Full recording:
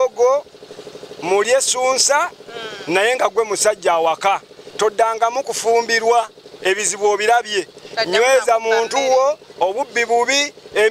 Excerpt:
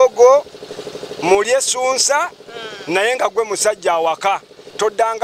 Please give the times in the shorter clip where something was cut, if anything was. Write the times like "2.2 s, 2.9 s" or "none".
none